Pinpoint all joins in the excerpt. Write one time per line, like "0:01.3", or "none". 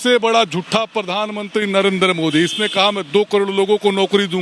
none